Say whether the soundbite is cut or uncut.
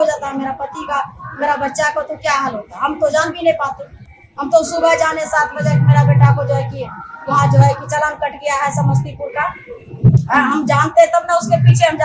uncut